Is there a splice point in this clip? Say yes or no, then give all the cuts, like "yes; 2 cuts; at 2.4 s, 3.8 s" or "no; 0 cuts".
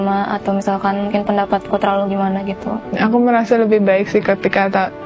yes; 1 cut; at 2.9 s